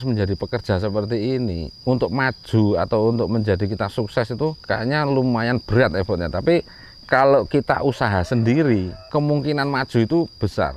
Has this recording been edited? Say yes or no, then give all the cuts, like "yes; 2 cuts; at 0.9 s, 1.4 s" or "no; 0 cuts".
yes; 3 cuts; at 1.7 s, 4.6 s, 9.0 s